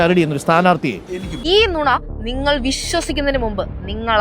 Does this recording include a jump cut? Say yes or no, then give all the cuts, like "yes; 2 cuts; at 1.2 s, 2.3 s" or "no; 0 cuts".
yes; 1 cut; at 1.3 s